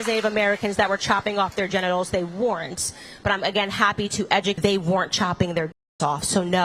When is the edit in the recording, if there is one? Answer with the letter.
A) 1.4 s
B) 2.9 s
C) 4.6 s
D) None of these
C